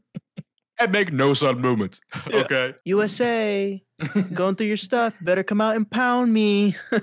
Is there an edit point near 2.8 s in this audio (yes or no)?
yes